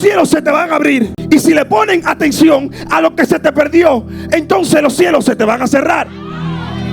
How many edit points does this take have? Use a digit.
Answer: 1